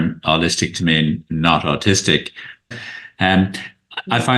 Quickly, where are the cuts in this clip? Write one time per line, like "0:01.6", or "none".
0:02.7